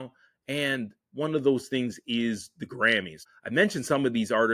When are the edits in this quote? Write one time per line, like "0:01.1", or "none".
0:03.2